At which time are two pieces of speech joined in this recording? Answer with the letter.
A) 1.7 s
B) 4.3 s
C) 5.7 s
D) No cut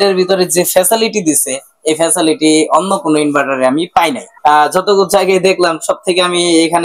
B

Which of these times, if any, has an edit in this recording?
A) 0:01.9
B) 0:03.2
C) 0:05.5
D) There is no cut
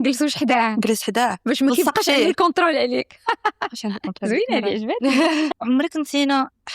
C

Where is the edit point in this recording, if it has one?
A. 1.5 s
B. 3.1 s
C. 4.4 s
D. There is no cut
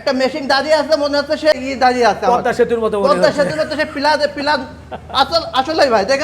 A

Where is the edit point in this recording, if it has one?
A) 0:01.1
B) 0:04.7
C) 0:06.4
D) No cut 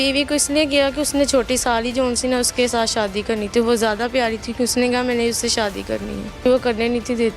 C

